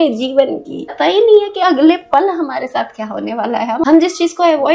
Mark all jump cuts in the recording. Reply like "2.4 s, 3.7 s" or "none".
0.9 s, 3.8 s

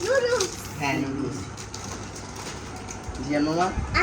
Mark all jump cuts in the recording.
1.6 s

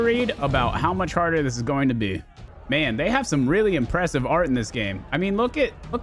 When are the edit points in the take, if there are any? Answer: none

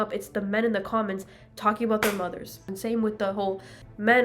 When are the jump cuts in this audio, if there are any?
2.6 s

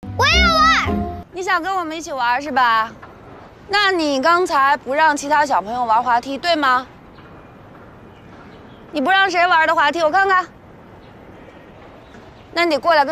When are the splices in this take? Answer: 1.2 s

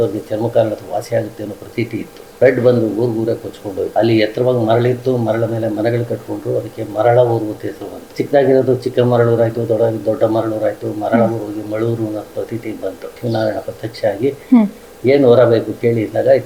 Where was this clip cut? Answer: 2.3 s, 3.9 s, 8.0 s, 13.1 s

